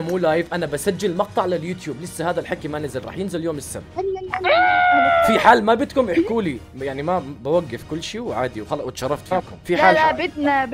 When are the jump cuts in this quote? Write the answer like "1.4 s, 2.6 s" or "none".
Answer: none